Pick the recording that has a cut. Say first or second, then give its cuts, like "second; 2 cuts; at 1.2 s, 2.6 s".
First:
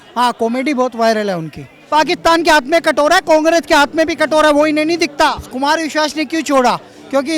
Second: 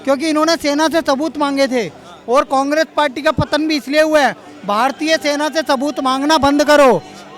first; 2 cuts; at 1.8 s, 5.4 s